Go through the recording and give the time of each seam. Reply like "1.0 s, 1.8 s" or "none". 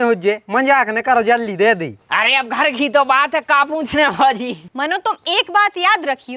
2.0 s, 4.6 s